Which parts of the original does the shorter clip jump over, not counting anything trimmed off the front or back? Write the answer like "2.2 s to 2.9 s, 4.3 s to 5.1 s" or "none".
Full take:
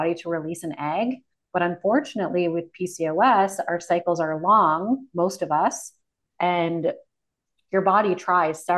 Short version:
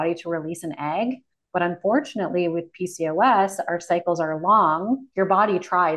5.1 s to 7.6 s